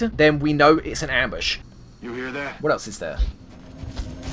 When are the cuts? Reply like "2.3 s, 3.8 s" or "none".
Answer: 1.5 s